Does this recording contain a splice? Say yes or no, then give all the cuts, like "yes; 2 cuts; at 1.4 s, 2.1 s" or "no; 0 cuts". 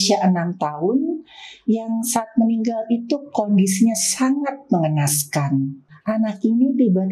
yes; 1 cut; at 5.9 s